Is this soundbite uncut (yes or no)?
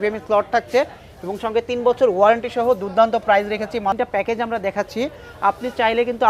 no